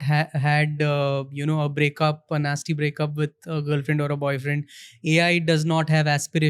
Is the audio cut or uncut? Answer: uncut